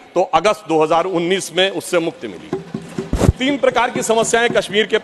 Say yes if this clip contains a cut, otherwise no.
no